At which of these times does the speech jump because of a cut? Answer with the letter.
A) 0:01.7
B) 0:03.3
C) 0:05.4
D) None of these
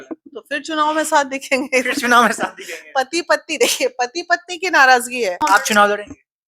C